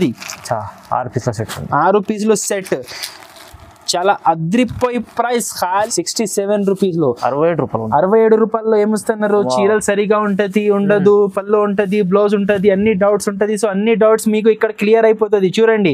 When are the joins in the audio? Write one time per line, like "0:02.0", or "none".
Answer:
0:05.9